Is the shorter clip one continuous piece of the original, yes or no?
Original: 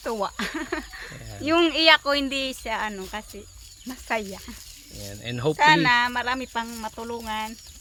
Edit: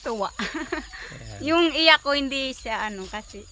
yes